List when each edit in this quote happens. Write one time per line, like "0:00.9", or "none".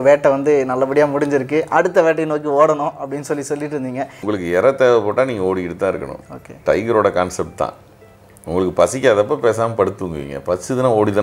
0:04.2